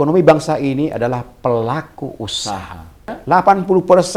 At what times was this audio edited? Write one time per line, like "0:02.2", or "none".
0:03.1